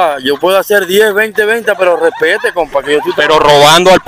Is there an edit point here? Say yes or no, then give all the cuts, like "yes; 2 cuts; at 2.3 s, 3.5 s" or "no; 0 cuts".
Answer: yes; 1 cut; at 3.1 s